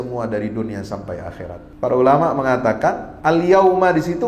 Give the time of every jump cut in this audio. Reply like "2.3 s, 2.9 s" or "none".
1.6 s